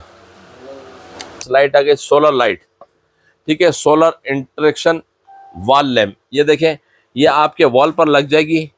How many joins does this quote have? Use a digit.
1